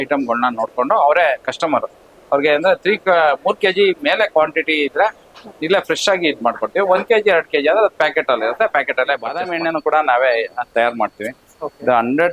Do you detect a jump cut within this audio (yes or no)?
yes